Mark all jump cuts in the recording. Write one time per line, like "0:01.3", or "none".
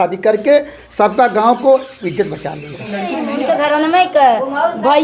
0:03.3